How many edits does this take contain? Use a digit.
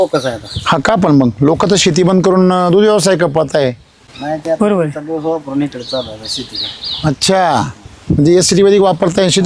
0